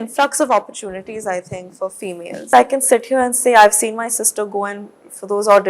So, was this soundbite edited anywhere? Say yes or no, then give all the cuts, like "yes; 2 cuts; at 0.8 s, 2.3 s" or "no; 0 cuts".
yes; 1 cut; at 2.5 s